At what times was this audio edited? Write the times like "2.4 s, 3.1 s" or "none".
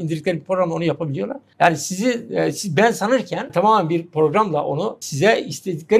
1.4 s, 3.5 s, 5.1 s